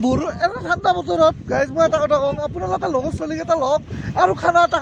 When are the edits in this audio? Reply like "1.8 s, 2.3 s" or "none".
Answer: none